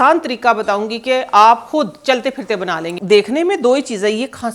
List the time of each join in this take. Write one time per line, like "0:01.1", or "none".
0:02.9